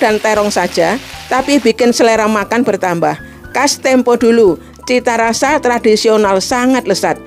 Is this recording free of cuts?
yes; 0 cuts

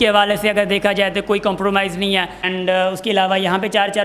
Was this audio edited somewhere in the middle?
yes; 1 cut; at 2.5 s

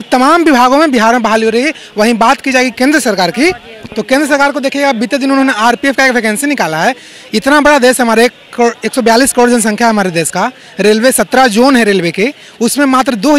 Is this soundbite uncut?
yes; 0 cuts

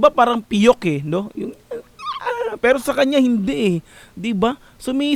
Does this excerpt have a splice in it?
no; 0 cuts

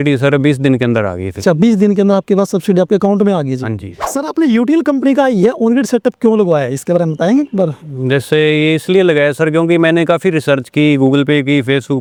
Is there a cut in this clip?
no; 0 cuts

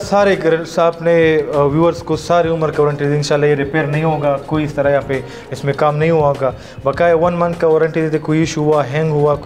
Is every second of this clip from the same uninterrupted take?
yes; 0 cuts

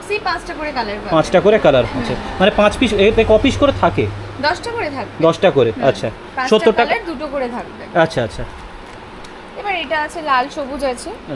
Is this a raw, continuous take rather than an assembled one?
yes; 0 cuts

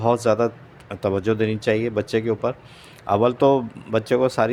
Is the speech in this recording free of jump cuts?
yes; 0 cuts

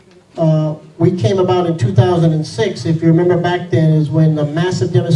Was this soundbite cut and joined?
yes; 1 cut; at 3.4 s

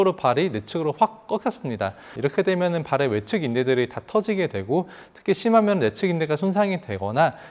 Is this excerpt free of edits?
no; 1 cut; at 2.1 s

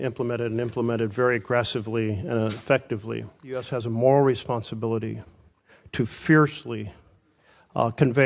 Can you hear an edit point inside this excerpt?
yes; 1 cut; at 3.7 s

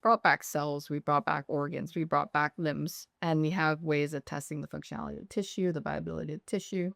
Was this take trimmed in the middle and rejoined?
no; 0 cuts

